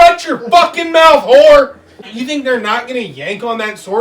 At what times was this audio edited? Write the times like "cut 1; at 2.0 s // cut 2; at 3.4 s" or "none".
cut 1; at 2.1 s